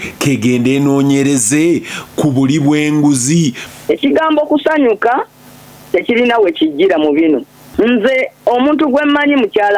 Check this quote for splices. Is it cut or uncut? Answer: cut